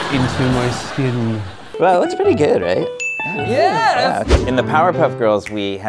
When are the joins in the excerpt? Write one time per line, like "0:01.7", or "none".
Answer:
0:01.7
0:04.3